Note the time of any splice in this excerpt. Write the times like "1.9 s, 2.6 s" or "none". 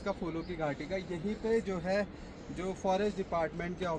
none

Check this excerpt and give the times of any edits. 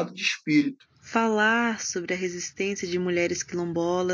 0.9 s

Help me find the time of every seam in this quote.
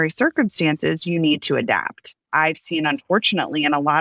2.2 s

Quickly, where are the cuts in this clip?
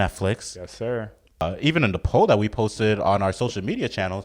1.4 s

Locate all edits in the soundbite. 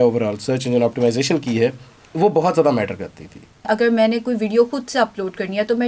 3.6 s

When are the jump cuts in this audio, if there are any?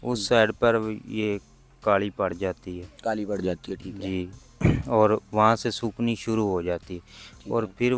none

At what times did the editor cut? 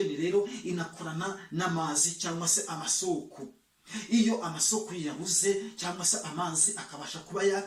none

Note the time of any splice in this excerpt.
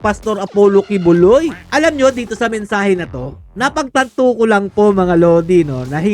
1.6 s

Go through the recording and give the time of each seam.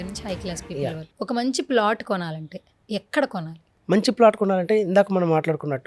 1.1 s

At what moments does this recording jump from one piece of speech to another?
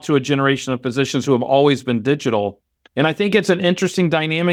none

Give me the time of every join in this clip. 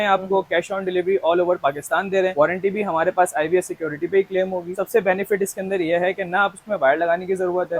none

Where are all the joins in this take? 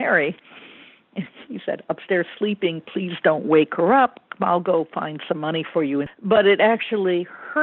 6.1 s

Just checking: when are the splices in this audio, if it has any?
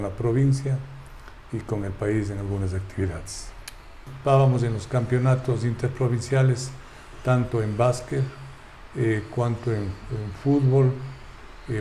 4.1 s

